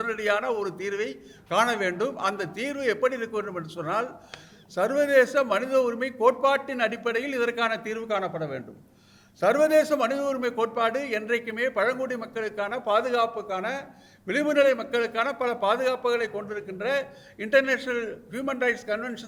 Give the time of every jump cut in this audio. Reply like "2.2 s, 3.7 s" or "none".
none